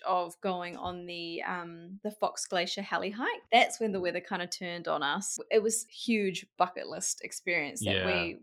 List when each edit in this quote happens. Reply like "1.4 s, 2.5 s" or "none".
1.9 s, 3.4 s, 5.3 s, 5.9 s